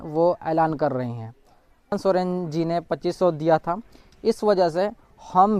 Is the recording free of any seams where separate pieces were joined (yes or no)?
no